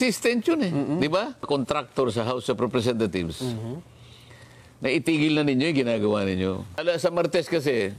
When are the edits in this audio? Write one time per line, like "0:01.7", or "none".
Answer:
0:01.4
0:06.8